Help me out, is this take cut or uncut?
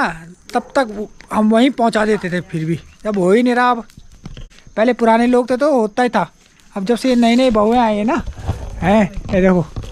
uncut